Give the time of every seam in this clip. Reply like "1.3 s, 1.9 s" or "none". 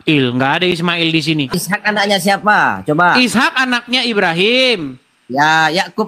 1.5 s